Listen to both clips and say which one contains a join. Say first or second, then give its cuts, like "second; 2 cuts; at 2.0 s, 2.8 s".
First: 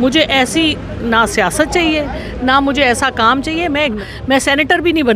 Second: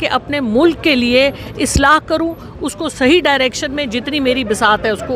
first; 1 cut; at 4.0 s